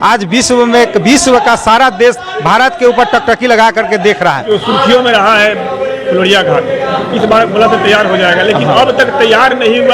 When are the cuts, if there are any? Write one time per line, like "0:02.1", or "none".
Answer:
0:04.4